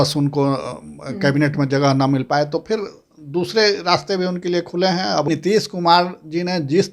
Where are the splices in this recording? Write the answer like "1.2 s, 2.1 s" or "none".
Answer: 5.3 s